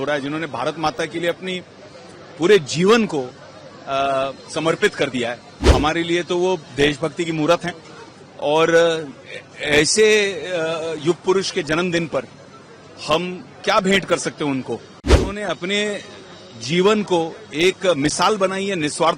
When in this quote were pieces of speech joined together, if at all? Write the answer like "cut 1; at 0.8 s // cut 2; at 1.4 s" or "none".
cut 1; at 5.7 s // cut 2; at 15.3 s